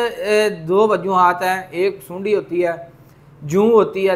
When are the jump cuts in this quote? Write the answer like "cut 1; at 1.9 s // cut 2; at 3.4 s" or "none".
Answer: none

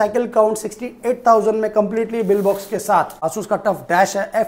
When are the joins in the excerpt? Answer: cut 1; at 3.2 s

